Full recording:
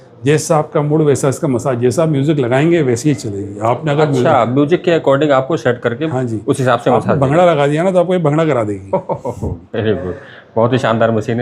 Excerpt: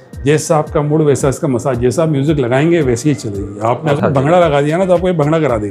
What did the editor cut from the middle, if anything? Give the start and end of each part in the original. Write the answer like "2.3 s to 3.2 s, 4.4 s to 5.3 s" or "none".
3.9 s to 7.0 s